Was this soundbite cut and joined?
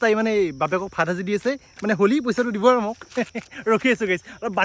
no; 0 cuts

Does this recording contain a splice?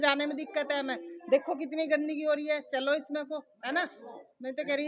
no; 0 cuts

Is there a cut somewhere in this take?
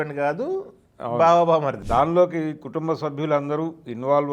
yes; 1 cut; at 1.8 s

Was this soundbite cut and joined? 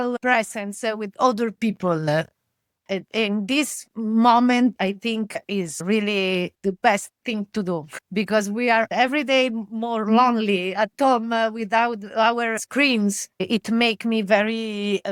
no; 0 cuts

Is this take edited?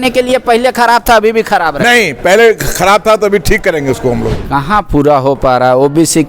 yes; 1 cut; at 4.4 s

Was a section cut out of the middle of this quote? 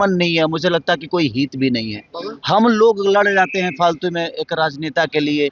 no; 0 cuts

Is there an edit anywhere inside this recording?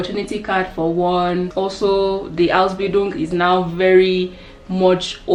no; 0 cuts

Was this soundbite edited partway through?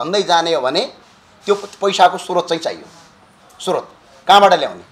no; 0 cuts

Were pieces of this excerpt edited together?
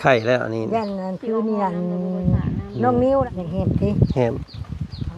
yes; 1 cut; at 3.3 s

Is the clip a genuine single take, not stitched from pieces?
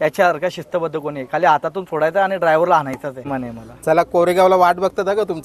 no; 1 cut; at 3.3 s

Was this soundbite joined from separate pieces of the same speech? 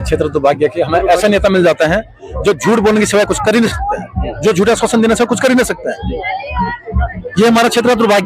no; 0 cuts

